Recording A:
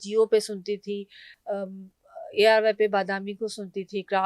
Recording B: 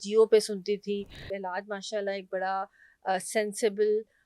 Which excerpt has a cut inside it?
B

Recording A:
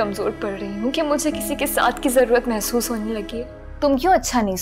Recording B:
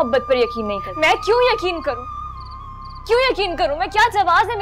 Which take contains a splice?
A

